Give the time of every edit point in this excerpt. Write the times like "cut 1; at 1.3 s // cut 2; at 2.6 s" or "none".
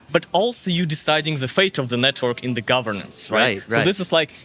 none